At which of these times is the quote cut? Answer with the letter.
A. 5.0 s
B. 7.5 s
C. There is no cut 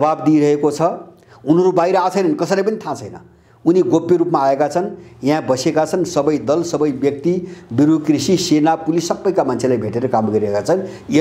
C